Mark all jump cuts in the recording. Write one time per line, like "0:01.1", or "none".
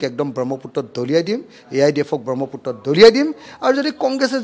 none